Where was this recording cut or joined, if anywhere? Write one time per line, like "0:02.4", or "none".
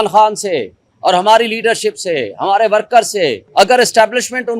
0:03.4